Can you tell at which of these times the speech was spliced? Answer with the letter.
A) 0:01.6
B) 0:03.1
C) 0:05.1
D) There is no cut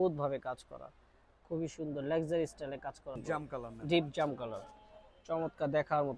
B